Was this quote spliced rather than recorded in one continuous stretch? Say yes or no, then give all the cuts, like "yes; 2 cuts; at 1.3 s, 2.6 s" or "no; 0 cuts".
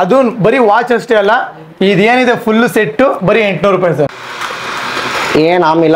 yes; 1 cut; at 4.2 s